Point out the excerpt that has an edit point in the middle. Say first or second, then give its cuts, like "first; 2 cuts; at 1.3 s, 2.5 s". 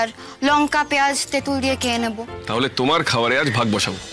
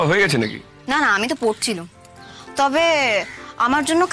first; 1 cut; at 2.3 s